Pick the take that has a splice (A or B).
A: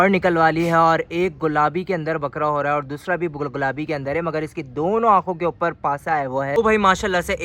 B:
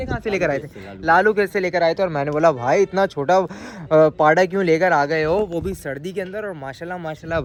A